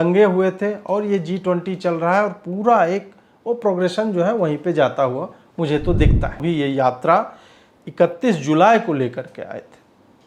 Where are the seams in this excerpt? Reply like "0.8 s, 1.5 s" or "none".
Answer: 6.4 s